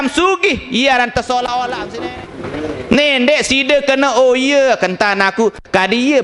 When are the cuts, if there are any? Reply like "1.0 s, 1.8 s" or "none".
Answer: 1.8 s